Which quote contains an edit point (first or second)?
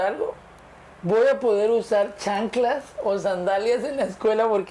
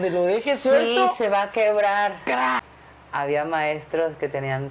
second